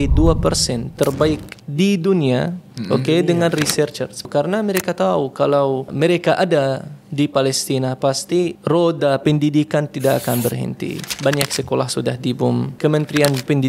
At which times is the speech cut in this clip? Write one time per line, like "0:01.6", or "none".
0:04.3
0:05.9
0:08.6
0:11.1
0:12.7